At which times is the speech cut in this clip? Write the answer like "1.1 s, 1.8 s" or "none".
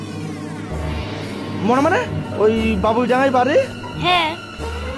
2.2 s

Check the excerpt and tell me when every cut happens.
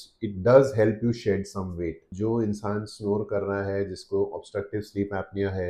2.1 s

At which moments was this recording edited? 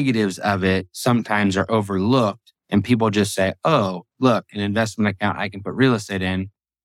0.9 s

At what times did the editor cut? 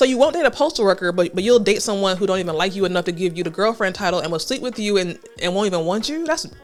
none

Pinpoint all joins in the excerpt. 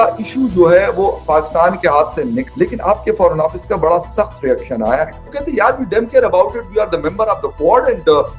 2.5 s, 5.3 s

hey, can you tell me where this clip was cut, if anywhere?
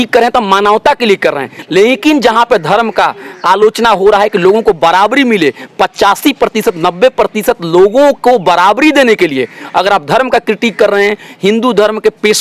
1.6 s

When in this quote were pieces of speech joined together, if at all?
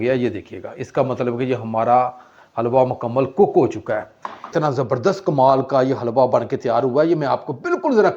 4.5 s

